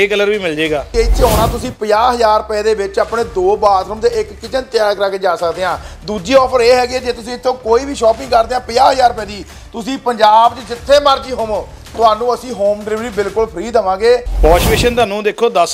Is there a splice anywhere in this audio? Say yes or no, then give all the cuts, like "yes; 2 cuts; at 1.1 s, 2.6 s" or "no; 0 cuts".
yes; 2 cuts; at 0.9 s, 14.3 s